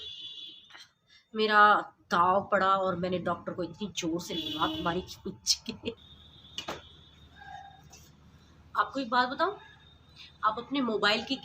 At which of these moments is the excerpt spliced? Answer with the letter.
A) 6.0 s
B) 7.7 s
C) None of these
A